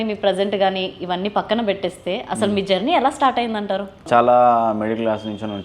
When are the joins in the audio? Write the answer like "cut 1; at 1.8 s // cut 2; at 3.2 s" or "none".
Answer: cut 1; at 4.0 s

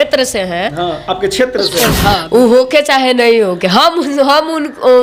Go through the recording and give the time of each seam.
cut 1; at 2.2 s

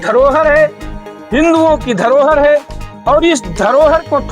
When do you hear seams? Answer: none

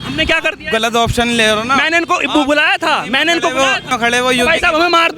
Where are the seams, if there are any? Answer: cut 1; at 3.9 s

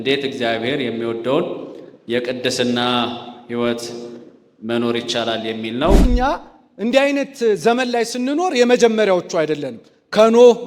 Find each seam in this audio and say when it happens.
cut 1; at 6.0 s

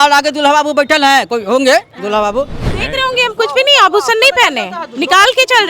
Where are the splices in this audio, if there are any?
cut 1; at 2.8 s

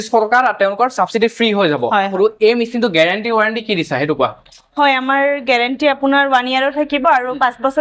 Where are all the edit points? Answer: cut 1; at 2.1 s

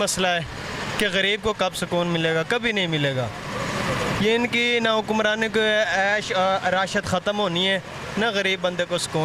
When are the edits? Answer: none

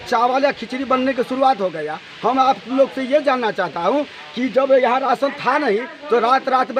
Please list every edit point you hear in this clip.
none

